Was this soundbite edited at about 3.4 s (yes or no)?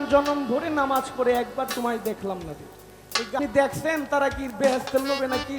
yes